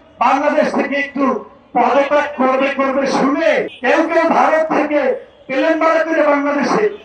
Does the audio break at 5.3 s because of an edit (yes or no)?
no